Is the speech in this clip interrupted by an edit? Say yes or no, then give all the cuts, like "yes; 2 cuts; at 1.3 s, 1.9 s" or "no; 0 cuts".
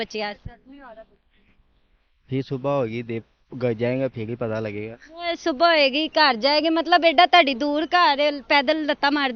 no; 0 cuts